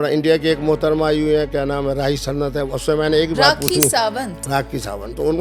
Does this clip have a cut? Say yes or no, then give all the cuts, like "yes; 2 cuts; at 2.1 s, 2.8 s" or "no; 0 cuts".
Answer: no; 0 cuts